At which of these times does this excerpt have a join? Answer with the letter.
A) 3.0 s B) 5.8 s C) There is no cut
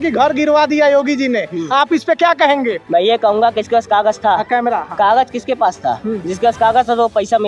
C